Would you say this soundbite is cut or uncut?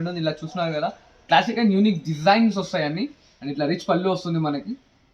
uncut